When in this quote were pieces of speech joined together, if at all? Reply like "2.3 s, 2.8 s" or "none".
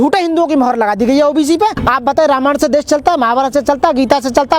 1.8 s